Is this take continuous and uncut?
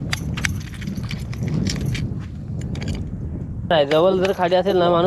no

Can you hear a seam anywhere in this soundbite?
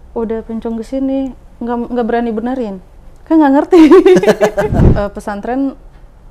yes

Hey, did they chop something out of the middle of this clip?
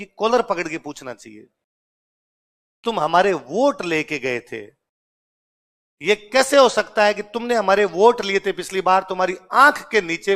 no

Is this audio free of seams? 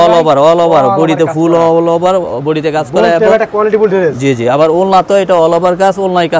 yes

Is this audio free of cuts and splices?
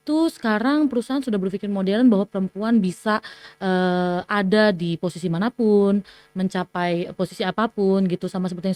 yes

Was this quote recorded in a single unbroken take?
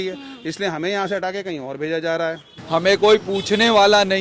no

